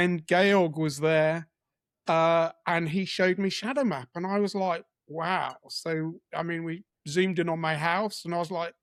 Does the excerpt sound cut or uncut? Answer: uncut